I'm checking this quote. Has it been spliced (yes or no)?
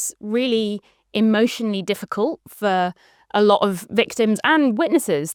no